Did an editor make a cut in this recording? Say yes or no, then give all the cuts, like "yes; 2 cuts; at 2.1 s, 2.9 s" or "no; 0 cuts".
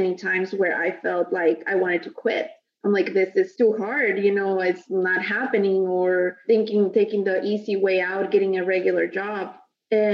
yes; 2 cuts; at 3.5 s, 6.4 s